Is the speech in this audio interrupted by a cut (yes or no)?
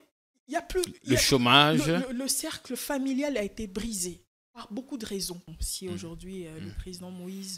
yes